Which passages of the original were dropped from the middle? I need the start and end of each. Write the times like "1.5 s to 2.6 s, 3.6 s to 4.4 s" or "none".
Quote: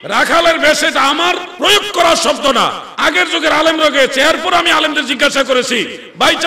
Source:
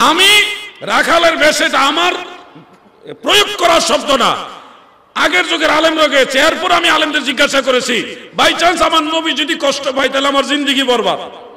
2.3 s to 3.1 s, 4.5 s to 5.0 s